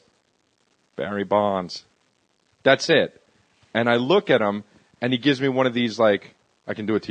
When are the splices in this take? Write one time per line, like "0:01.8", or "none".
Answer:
0:05.5